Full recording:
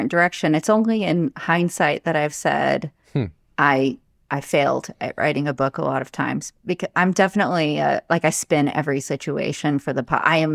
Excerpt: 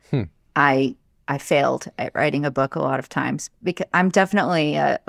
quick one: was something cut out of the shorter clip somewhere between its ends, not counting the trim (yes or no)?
no